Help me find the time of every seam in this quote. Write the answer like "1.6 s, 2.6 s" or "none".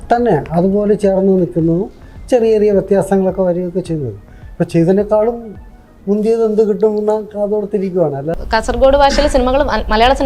8.3 s